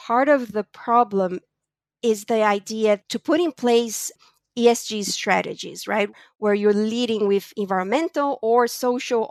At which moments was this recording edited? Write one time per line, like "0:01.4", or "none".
none

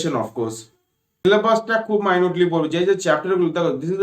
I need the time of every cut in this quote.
0:01.2

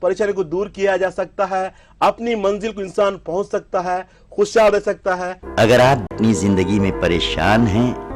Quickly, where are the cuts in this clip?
0:05.3
0:06.1

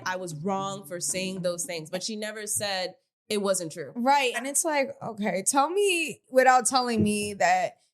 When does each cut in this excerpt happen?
0:04.5
0:06.1

